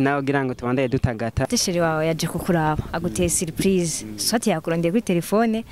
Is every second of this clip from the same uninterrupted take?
no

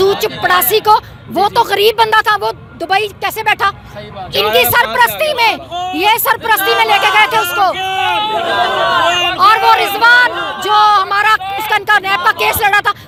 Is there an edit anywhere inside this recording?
no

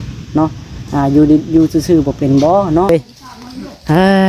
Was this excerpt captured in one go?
no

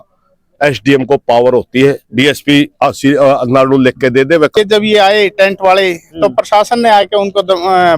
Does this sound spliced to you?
yes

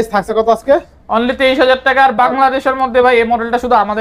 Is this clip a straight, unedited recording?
yes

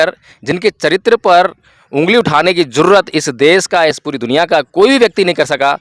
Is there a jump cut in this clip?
no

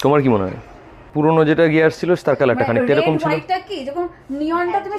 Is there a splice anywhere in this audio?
yes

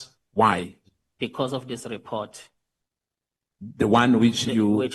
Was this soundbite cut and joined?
no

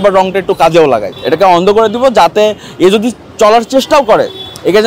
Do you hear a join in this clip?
yes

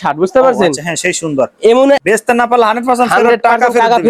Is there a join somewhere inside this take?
yes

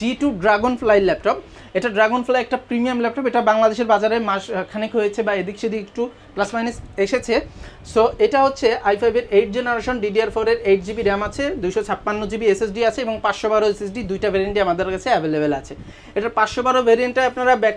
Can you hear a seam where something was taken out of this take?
no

